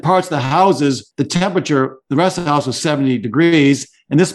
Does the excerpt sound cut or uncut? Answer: cut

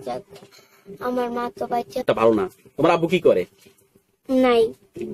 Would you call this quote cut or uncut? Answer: cut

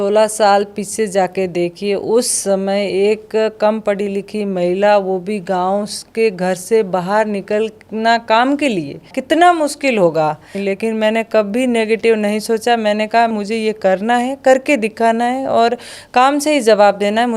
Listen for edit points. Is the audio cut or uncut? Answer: cut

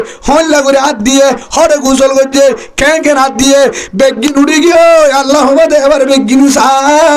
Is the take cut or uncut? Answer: uncut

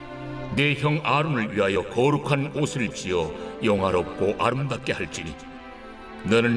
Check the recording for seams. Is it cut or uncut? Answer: cut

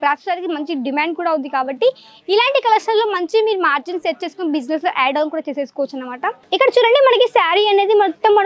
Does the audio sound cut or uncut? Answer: cut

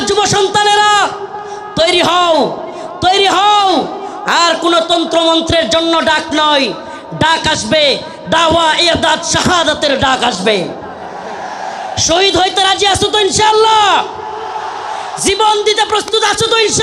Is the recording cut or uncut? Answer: uncut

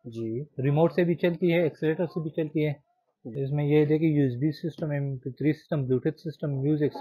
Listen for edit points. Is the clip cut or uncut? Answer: uncut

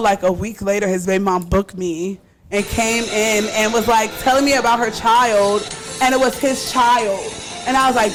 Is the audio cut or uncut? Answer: uncut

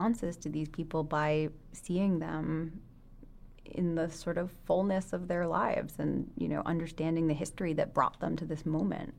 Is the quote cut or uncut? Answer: uncut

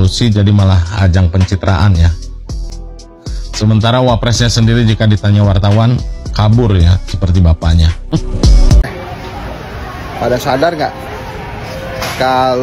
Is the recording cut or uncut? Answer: uncut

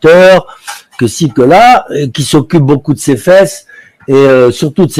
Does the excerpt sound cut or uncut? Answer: uncut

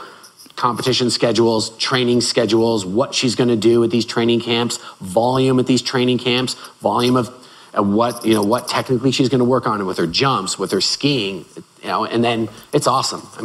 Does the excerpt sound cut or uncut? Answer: uncut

